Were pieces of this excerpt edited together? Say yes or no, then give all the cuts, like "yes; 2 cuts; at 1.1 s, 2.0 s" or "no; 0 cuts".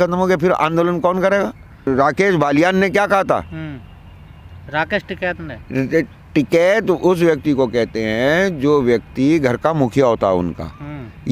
yes; 1 cut; at 1.9 s